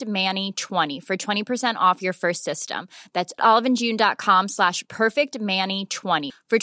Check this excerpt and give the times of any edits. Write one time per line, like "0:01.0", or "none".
none